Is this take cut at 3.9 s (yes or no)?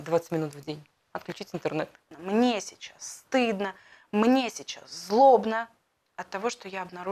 no